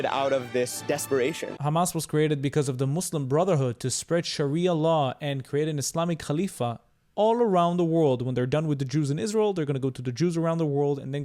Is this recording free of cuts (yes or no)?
no